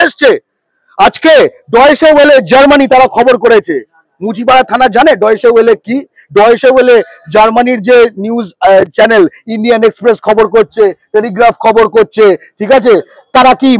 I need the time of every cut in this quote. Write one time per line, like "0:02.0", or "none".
none

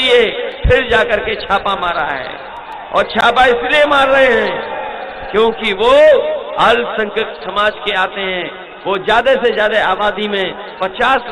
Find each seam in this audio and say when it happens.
none

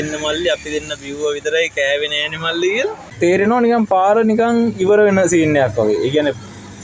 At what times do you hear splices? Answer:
0:03.1

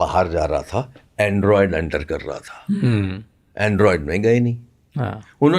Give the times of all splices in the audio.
none

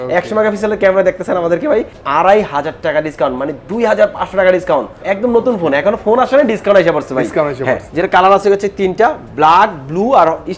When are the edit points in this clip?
0:02.0
0:07.9

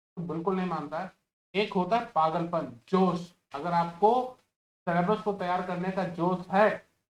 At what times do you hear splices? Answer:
none

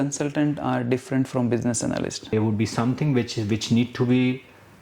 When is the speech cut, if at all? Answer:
0:02.2

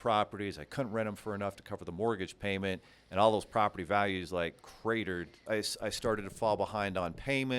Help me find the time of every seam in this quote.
0:05.4

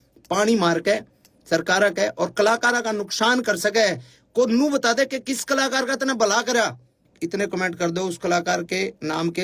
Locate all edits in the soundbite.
0:07.1

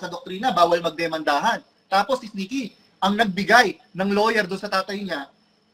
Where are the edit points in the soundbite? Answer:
none

